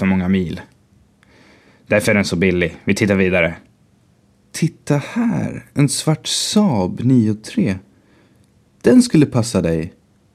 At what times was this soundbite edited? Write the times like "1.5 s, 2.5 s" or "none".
4.2 s